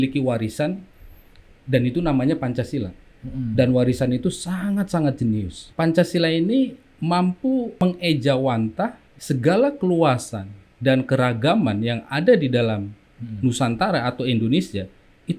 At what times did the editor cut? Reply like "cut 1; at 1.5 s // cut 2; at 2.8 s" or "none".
cut 1; at 5.6 s // cut 2; at 6.9 s // cut 3; at 7.8 s // cut 4; at 9.1 s

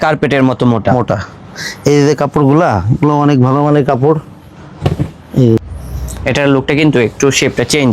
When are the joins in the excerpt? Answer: cut 1; at 5.6 s

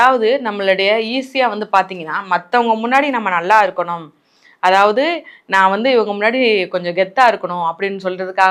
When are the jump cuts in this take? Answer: none

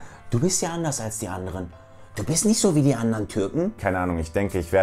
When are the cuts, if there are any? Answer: cut 1; at 3.8 s

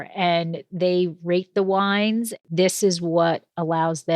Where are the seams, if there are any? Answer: cut 1; at 2.4 s

